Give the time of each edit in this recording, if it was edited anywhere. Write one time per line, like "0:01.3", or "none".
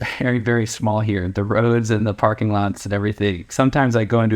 0:03.4